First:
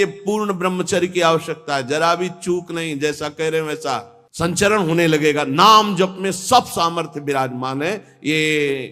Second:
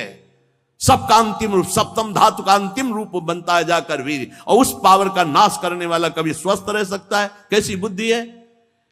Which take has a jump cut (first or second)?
first